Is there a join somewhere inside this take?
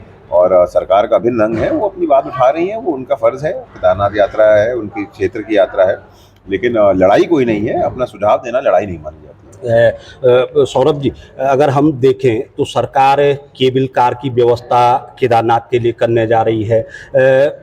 no; 0 cuts

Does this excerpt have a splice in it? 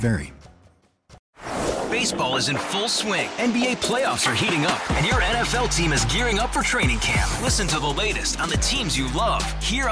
yes; 1 cut; at 1.2 s

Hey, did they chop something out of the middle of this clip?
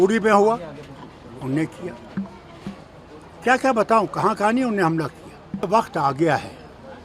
yes; 1 cut; at 5.7 s

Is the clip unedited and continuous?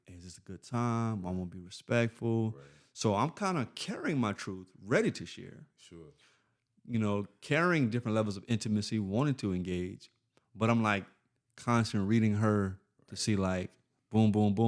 yes; 0 cuts

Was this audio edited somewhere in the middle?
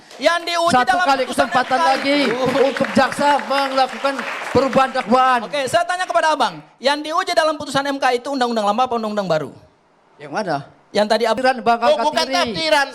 yes; 1 cut; at 11.4 s

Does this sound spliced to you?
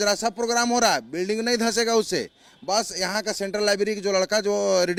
no; 0 cuts

